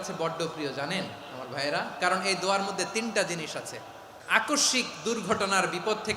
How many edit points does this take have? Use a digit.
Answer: 1